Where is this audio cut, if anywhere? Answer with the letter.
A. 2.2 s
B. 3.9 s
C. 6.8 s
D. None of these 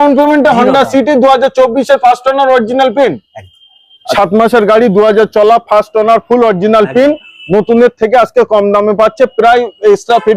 B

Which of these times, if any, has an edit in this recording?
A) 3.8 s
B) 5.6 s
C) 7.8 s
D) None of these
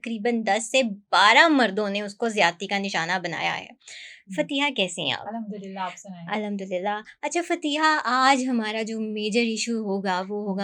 D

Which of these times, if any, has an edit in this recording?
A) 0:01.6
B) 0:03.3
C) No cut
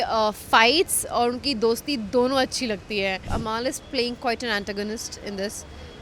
B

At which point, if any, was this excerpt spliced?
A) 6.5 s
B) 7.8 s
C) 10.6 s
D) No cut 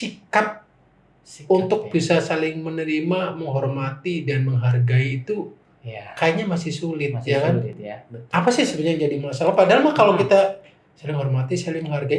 D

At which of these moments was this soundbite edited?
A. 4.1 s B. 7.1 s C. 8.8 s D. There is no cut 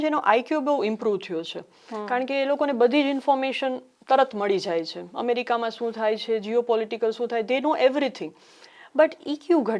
D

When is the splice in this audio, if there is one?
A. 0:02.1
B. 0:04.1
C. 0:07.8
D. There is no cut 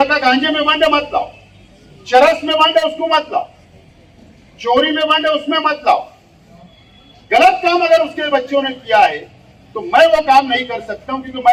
D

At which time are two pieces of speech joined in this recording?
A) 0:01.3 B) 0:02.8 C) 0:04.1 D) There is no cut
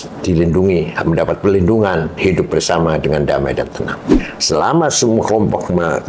C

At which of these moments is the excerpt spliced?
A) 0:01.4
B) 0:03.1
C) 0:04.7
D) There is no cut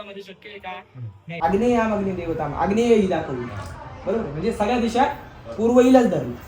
A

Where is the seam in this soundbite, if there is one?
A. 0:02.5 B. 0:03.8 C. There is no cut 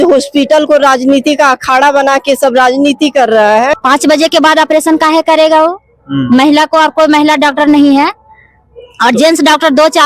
B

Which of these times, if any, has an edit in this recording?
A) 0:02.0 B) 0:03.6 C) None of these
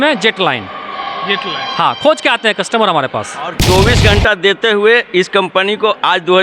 B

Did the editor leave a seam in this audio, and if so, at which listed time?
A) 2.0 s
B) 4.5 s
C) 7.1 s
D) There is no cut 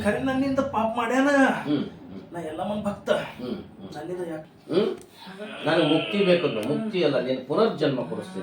B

